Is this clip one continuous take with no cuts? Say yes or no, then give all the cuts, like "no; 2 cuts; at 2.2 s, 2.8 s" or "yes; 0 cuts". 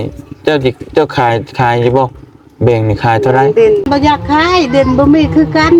no; 1 cut; at 3.9 s